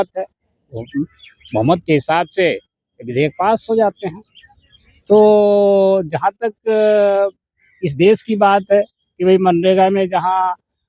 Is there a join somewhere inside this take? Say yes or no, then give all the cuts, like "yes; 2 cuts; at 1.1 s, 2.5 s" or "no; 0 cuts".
no; 0 cuts